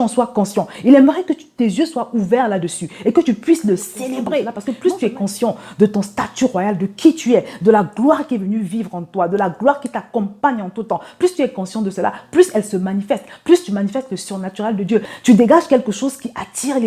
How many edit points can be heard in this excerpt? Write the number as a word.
two